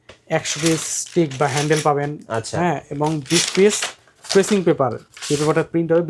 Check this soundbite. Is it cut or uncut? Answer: uncut